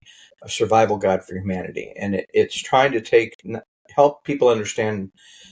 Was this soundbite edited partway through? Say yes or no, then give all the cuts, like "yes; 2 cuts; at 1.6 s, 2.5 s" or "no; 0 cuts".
no; 0 cuts